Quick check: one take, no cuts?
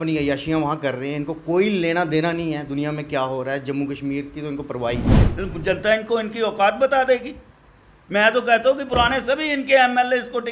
no; 1 cut; at 5.2 s

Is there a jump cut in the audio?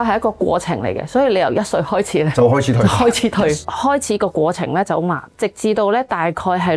yes; 2 cuts; at 3.6 s, 5.3 s

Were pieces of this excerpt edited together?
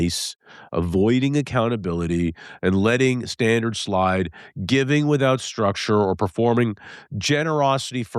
no; 0 cuts

